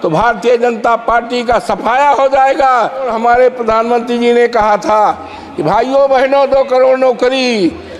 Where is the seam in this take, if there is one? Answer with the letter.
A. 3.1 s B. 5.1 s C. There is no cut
A